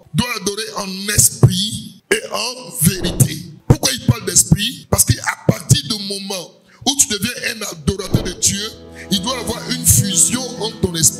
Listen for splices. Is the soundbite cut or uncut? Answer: uncut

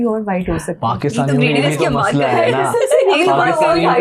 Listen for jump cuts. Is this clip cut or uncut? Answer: uncut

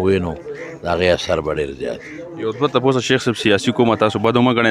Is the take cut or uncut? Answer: uncut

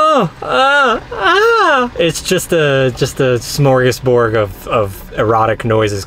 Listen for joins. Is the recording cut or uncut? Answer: uncut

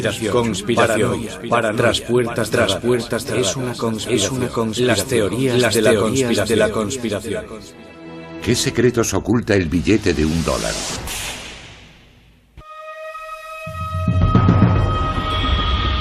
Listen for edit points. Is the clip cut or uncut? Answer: cut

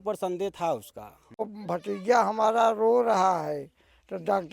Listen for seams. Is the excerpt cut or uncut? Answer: cut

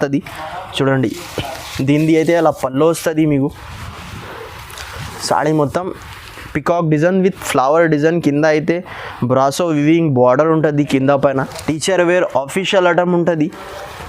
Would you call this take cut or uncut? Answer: cut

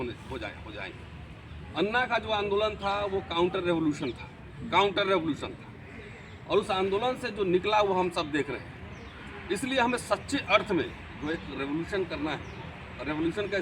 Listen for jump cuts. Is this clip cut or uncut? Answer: uncut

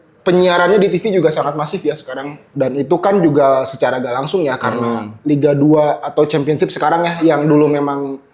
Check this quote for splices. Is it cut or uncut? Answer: cut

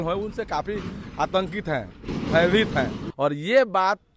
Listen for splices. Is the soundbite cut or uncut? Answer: cut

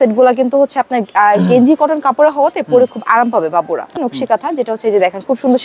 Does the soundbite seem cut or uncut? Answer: cut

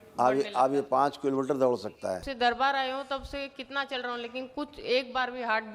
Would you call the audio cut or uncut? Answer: cut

